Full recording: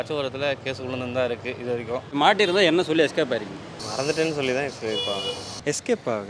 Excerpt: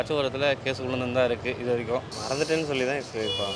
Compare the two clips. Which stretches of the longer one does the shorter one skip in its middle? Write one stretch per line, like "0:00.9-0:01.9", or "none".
0:02.1-0:03.7